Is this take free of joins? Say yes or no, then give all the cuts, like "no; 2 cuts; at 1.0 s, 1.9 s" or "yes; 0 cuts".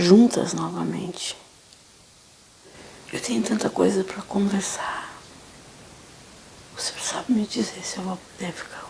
no; 1 cut; at 6.5 s